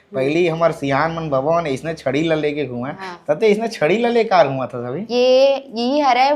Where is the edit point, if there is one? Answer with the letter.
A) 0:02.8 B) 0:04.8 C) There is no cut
C